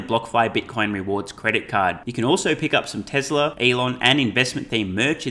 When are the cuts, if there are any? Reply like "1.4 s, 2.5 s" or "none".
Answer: 3.6 s

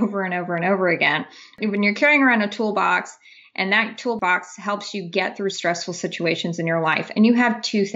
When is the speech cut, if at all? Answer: 1.6 s, 4.2 s

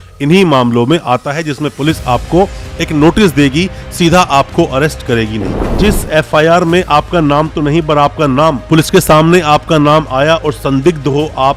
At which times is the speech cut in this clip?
5.7 s

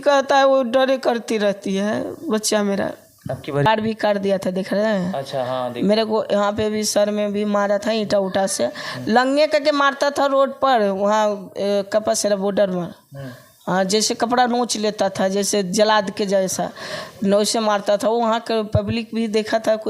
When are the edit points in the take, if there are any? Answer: 3.7 s

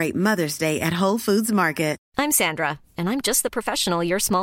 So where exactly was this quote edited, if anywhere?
2.0 s

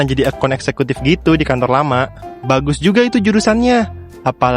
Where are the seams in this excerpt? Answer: 2.2 s

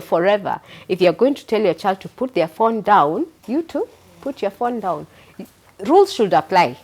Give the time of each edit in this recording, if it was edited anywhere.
3.4 s

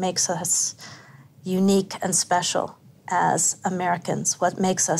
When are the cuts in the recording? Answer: none

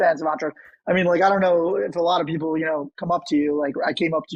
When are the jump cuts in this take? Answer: none

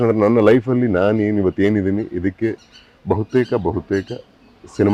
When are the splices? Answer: none

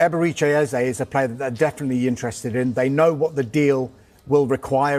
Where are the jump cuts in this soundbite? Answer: none

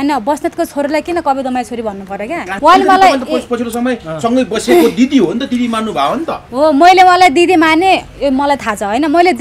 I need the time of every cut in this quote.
2.5 s

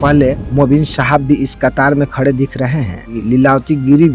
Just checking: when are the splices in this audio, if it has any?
3.1 s

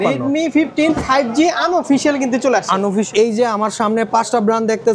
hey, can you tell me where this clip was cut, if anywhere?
3.1 s

